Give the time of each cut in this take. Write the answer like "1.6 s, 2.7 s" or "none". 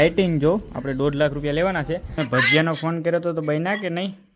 2.1 s